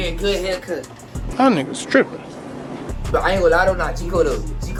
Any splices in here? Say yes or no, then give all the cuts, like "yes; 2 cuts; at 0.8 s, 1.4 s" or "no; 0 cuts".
no; 0 cuts